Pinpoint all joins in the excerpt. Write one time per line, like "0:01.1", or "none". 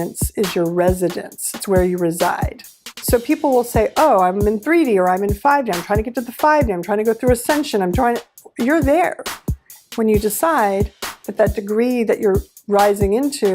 0:02.9